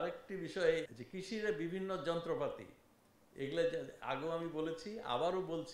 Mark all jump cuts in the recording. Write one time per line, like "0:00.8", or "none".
0:00.9

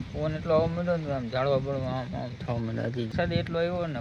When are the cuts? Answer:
0:03.0

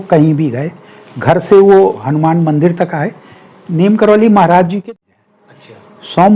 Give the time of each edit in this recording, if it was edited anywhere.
0:04.8

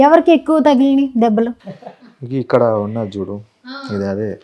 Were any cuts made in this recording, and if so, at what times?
0:01.6

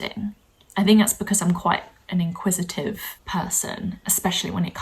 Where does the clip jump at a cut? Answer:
0:03.1

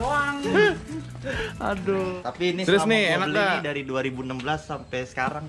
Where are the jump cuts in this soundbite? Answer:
0:02.2

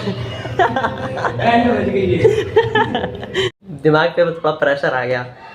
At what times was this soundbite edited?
0:03.6

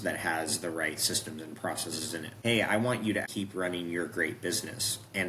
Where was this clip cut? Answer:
0:02.3
0:03.3

